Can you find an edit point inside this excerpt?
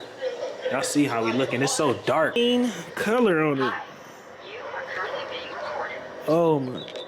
yes; 1 cut; at 2.4 s

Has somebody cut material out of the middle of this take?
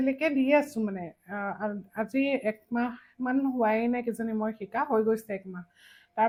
no; 0 cuts

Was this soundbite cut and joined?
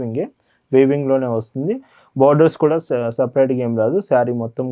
no; 0 cuts

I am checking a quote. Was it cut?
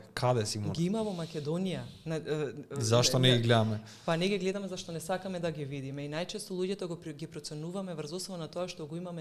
no; 0 cuts

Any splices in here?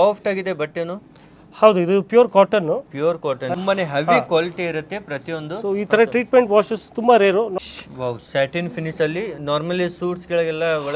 yes; 2 cuts; at 3.5 s, 7.6 s

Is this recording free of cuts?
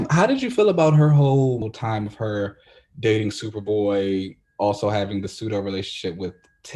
no; 1 cut; at 1.7 s

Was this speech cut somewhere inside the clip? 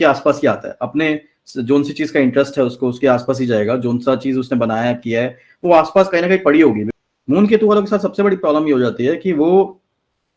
yes; 1 cut; at 6.9 s

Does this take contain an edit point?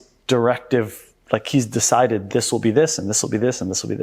no; 0 cuts

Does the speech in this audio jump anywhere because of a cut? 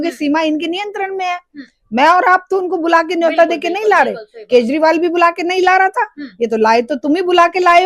no; 0 cuts

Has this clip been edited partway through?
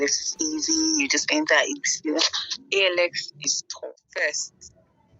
yes; 1 cut; at 3.8 s

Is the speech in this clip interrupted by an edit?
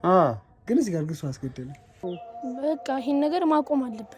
yes; 1 cut; at 2.0 s

